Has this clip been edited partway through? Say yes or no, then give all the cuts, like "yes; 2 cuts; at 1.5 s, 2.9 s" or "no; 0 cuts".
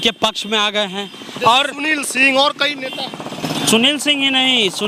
no; 0 cuts